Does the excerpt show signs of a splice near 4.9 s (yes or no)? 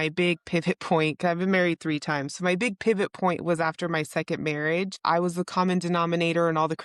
yes